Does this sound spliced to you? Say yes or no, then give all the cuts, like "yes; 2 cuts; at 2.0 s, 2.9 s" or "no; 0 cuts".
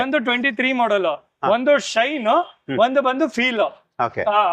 no; 0 cuts